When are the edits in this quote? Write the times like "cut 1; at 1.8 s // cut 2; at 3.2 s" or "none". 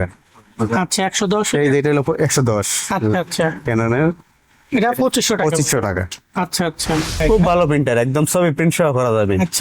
cut 1; at 7.2 s